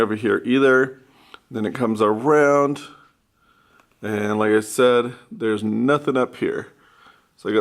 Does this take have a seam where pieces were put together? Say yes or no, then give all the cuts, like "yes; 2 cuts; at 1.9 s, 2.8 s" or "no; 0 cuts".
no; 0 cuts